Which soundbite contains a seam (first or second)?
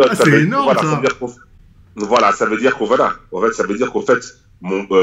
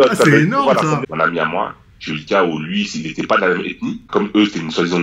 second